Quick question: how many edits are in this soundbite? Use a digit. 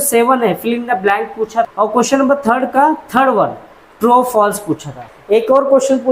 2